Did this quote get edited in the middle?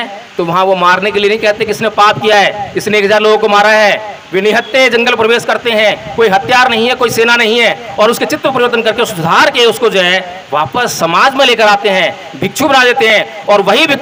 no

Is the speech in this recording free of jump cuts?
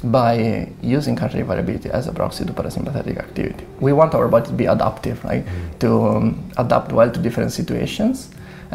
no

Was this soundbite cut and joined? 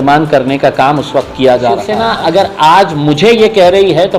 yes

